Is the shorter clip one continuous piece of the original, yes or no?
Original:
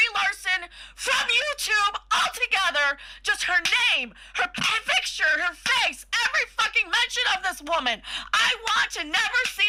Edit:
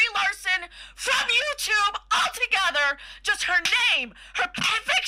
yes